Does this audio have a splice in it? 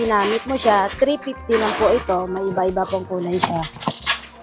no; 0 cuts

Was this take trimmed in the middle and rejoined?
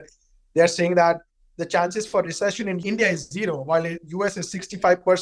yes; 1 cut; at 2.8 s

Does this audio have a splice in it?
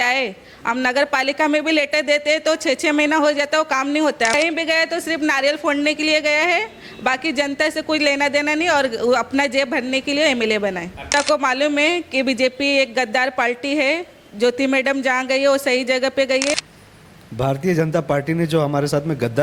yes; 3 cuts; at 4.3 s, 11.1 s, 16.6 s

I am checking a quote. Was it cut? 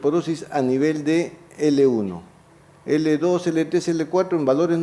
yes; 1 cut; at 1.0 s

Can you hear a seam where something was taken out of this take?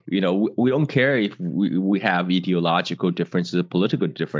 no; 0 cuts

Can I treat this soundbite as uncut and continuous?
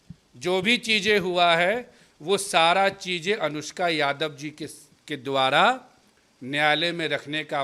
yes; 0 cuts

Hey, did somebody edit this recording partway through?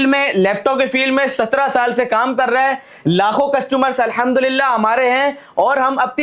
no; 0 cuts

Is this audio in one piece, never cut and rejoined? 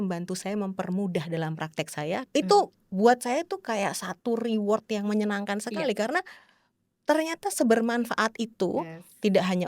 no; 1 cut; at 2.2 s

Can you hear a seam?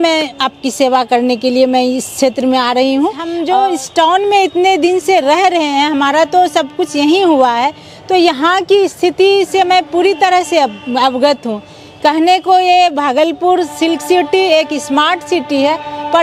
yes; 1 cut; at 3.3 s

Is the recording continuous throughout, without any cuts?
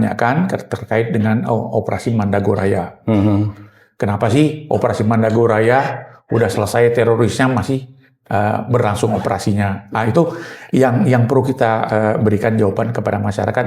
yes; 0 cuts

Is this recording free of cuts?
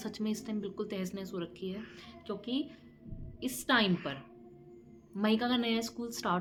yes; 0 cuts

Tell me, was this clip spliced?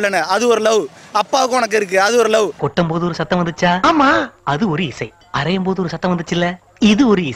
no; 0 cuts

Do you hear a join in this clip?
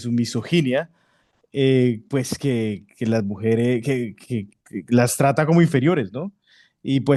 no; 0 cuts

